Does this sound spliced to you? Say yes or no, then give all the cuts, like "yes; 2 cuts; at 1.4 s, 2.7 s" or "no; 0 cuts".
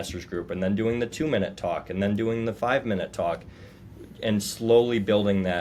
no; 0 cuts